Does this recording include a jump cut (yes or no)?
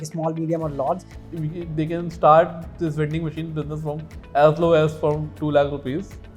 yes